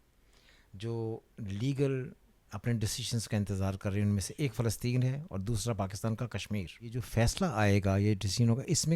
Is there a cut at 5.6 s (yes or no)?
no